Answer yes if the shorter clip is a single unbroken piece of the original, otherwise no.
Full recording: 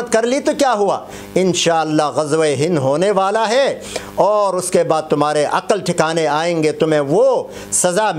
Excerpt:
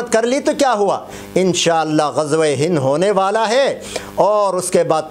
yes